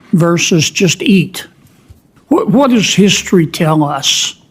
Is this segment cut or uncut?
cut